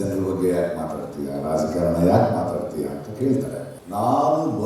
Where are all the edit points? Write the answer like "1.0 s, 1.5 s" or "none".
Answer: 3.7 s